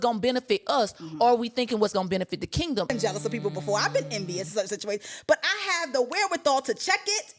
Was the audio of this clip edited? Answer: yes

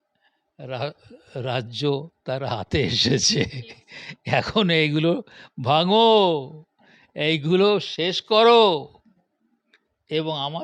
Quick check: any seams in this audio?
no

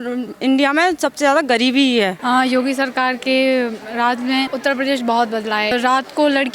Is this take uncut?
no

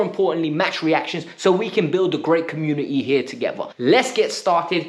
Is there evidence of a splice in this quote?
yes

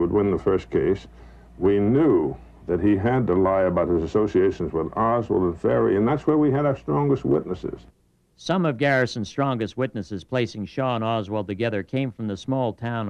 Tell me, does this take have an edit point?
no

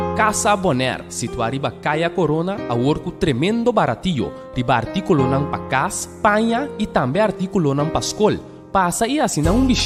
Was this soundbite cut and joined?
no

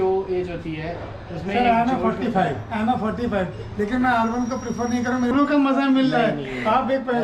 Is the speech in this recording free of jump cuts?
no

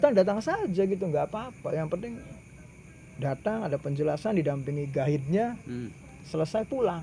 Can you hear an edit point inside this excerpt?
no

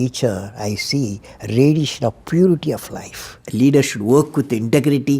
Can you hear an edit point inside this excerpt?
yes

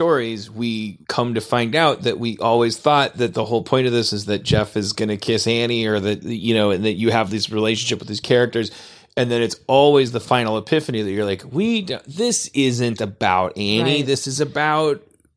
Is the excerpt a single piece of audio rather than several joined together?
no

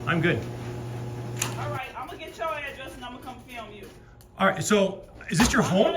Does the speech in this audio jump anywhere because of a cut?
yes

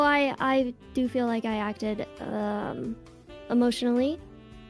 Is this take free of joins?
yes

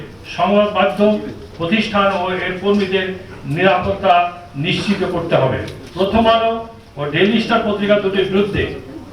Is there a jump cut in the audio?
yes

